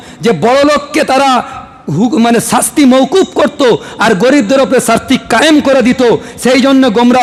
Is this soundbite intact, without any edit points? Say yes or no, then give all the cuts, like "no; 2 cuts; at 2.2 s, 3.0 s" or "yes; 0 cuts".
yes; 0 cuts